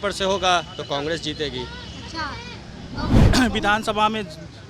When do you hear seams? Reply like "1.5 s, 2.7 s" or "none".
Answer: 3.2 s

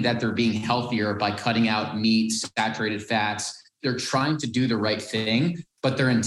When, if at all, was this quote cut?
3.7 s

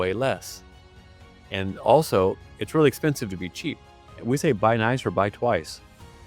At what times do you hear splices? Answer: 2.5 s, 4.2 s

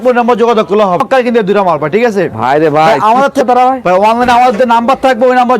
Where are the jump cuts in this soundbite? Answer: 1.0 s, 3.4 s

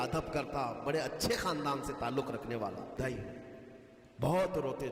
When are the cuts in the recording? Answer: 3.0 s

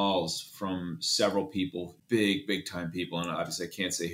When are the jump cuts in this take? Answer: 1.9 s

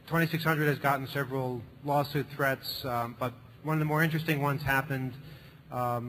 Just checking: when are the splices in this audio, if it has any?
1.1 s

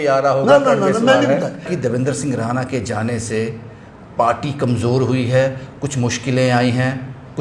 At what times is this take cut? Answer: 1.7 s

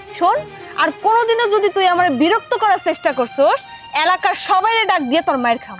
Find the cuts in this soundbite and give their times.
none

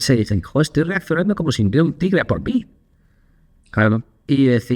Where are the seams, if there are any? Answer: none

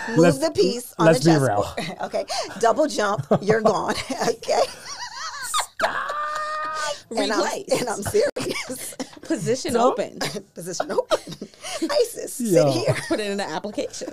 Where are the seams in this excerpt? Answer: none

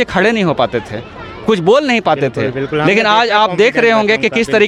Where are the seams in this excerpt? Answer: none

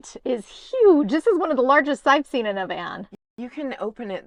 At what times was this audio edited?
none

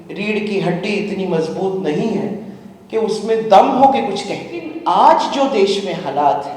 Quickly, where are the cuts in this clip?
4.7 s

